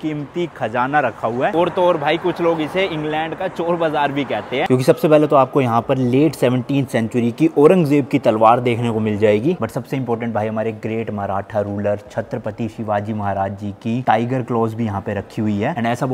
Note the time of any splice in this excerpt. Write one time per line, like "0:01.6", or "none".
0:01.5
0:04.7
0:09.6